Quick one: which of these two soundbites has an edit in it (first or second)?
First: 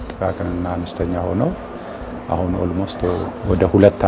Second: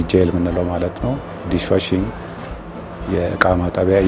first